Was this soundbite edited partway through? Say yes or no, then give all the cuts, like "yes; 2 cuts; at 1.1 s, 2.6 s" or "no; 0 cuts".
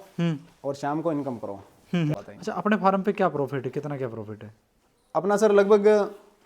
yes; 1 cut; at 2.2 s